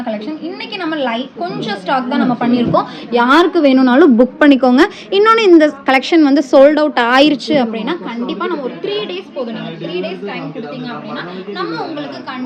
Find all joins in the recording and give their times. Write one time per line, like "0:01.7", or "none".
none